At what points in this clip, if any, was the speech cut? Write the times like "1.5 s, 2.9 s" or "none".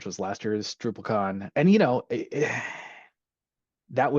1.5 s